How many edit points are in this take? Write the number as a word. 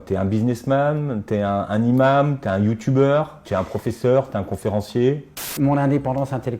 two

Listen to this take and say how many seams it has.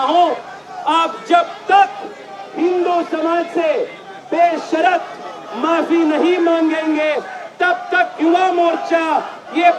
zero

